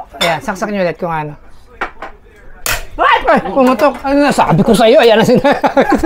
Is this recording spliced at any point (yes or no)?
no